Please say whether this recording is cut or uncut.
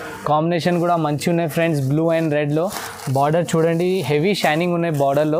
uncut